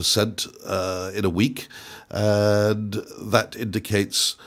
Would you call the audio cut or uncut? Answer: uncut